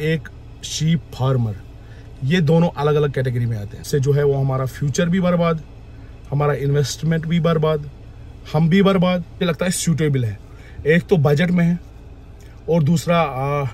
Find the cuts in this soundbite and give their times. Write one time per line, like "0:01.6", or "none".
0:03.9
0:09.4